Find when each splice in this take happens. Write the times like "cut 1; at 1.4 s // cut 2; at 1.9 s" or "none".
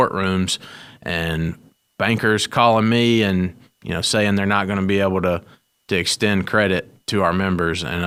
none